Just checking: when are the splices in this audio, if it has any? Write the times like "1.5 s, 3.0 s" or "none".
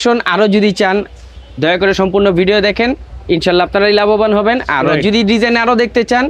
none